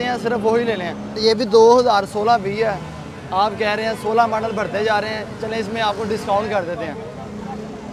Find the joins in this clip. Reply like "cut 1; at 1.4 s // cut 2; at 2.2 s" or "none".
cut 1; at 1.2 s

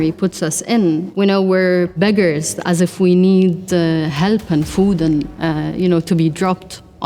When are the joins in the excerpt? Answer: cut 1; at 1.1 s // cut 2; at 1.9 s

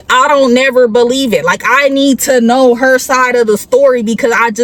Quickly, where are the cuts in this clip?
none

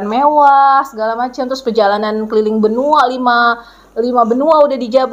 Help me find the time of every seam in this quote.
none

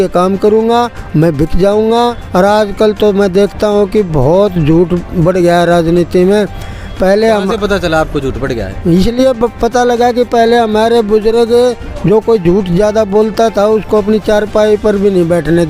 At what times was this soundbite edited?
cut 1; at 2.2 s

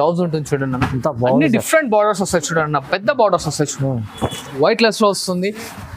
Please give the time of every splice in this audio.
cut 1; at 4.6 s

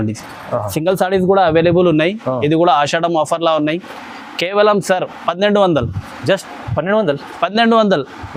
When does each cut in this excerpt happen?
none

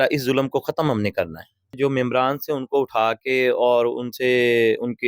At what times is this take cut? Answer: cut 1; at 1.8 s

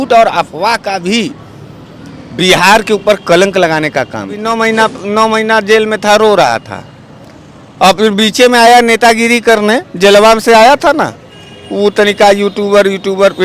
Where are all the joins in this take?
cut 1; at 4.4 s

